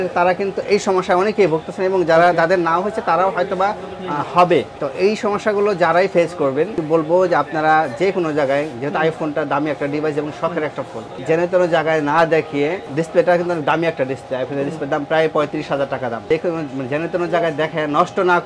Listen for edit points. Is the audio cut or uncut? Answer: cut